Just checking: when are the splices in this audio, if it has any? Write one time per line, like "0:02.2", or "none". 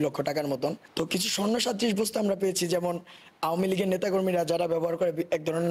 0:00.9